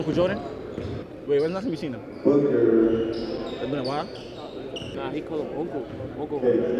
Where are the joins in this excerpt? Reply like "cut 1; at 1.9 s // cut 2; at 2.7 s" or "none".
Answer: cut 1; at 1.1 s // cut 2; at 4.9 s